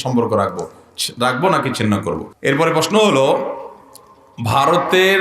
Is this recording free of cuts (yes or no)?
no